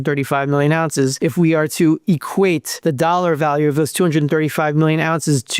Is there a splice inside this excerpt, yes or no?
yes